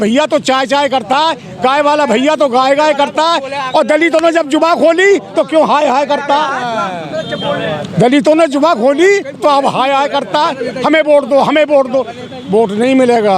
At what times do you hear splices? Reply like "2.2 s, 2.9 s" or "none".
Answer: none